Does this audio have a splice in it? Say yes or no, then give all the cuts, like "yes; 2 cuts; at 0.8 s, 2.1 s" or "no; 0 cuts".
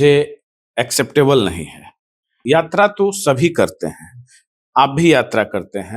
yes; 1 cut; at 2.3 s